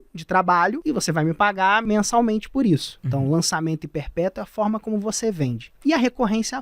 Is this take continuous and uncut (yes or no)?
no